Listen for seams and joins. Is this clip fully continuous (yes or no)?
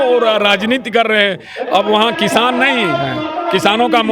yes